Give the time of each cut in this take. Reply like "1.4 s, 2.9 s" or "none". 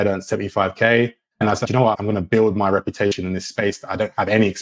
1.6 s